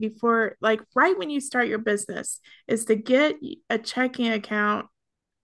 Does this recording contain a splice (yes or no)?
no